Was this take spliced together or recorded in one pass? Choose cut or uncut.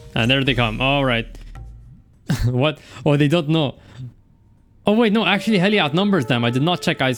uncut